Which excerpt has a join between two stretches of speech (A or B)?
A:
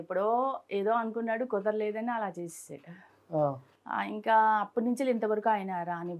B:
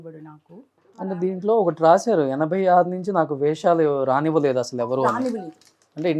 B